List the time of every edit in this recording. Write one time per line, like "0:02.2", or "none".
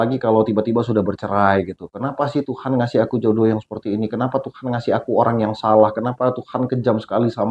none